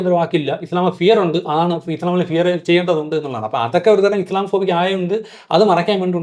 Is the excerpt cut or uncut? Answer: uncut